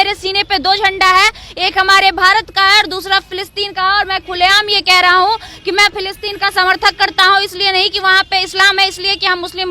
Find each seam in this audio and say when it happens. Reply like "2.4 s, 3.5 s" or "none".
none